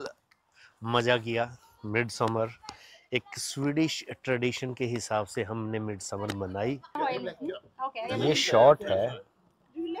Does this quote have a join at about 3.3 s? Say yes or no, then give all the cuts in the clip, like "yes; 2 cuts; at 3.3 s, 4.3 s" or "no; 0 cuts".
no; 1 cut; at 6.9 s